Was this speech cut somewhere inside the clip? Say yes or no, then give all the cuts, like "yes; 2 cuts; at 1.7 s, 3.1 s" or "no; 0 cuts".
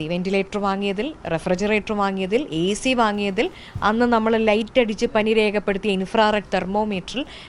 no; 0 cuts